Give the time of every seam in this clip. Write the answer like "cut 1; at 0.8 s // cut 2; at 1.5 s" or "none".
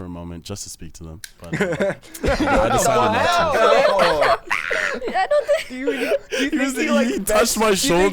cut 1; at 1.3 s